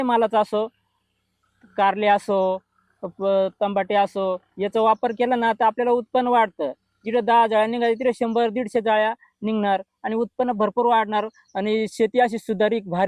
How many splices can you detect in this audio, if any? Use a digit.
0